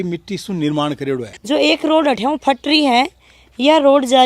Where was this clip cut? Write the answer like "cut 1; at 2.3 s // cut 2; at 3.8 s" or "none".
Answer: cut 1; at 1.3 s